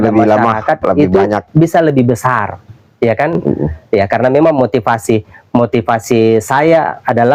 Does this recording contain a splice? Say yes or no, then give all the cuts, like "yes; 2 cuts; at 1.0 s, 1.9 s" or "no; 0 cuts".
no; 0 cuts